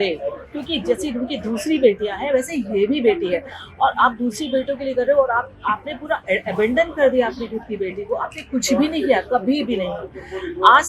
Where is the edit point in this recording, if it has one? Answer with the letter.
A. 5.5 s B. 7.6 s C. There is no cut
C